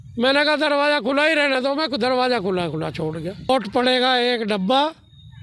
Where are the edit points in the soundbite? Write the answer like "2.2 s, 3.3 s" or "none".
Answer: 3.5 s